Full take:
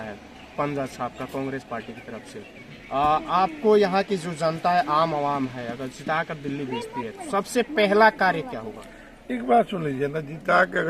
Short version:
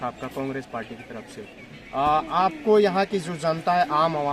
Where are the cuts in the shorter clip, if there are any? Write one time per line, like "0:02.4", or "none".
none